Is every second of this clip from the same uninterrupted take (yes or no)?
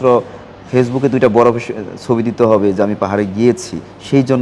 yes